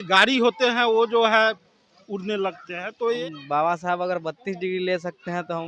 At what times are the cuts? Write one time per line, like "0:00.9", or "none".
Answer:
0:03.2

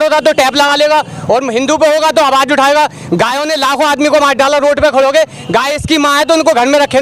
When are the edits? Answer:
none

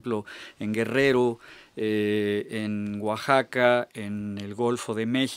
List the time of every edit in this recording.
0:03.7

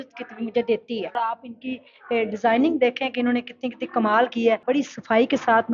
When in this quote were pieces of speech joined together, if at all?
0:01.2
0:04.6

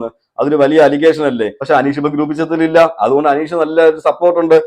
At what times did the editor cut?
0:01.5

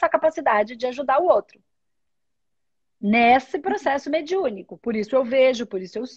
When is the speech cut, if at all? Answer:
none

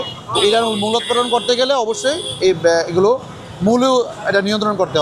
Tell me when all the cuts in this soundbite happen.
none

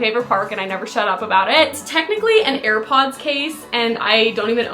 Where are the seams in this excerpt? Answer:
0:01.7

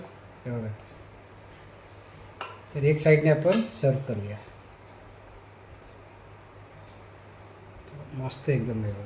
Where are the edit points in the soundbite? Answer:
none

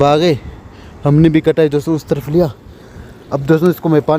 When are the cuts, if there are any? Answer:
none

